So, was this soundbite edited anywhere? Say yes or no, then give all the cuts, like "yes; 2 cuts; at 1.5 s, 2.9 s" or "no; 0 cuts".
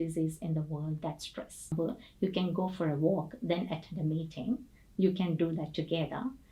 yes; 1 cut; at 1.7 s